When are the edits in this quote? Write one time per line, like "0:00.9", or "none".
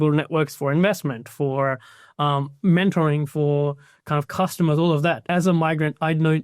0:05.2